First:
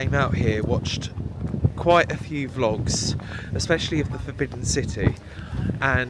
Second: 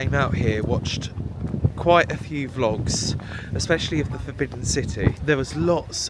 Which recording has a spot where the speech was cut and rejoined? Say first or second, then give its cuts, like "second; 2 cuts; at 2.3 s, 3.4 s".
second; 1 cut; at 5.2 s